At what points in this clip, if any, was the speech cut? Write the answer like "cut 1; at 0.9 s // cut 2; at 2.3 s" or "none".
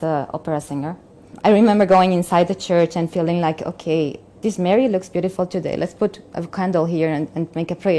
cut 1; at 1.3 s // cut 2; at 4.3 s